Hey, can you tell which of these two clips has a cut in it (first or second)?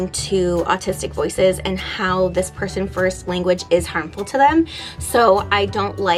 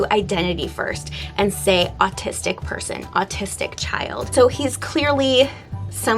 second